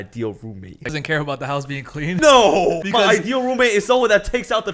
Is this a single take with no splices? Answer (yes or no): no